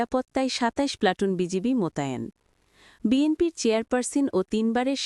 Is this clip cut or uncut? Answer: uncut